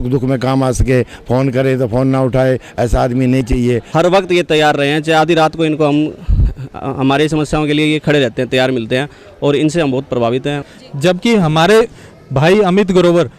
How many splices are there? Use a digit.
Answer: 2